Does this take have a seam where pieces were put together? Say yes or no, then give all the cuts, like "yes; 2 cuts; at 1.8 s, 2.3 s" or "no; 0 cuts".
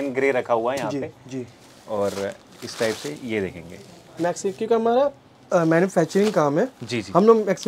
no; 0 cuts